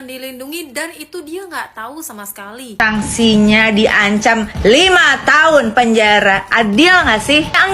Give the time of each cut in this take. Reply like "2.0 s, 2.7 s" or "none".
2.7 s